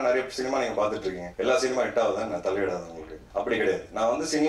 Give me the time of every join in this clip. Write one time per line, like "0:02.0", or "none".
none